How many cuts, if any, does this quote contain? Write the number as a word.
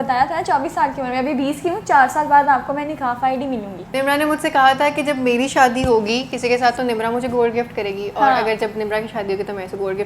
zero